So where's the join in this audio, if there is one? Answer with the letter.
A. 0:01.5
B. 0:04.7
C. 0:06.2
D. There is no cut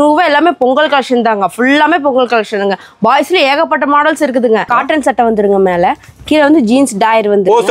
B